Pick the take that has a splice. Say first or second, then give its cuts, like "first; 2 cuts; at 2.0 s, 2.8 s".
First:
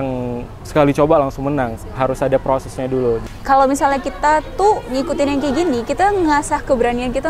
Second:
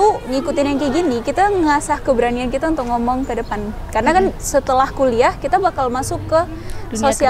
first; 1 cut; at 3.3 s